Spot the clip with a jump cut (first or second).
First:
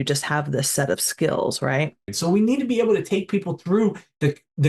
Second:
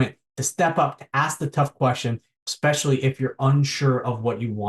first